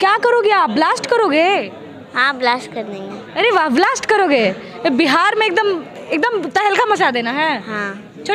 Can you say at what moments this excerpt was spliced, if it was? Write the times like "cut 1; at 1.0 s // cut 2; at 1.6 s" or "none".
none